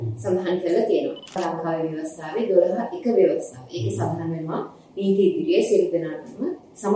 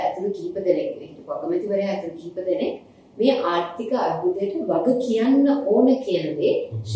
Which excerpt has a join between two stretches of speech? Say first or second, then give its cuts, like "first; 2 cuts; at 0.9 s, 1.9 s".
first; 1 cut; at 1.4 s